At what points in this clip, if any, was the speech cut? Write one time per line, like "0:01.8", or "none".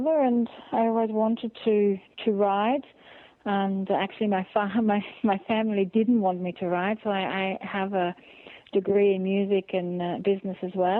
none